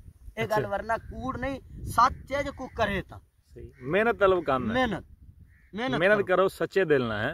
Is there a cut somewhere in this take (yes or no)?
no